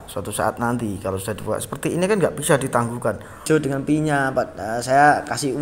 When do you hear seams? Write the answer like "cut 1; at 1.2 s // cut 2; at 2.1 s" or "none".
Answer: cut 1; at 3.4 s